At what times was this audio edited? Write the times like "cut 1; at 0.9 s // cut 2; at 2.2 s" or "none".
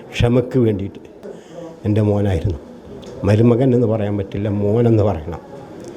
cut 1; at 1.2 s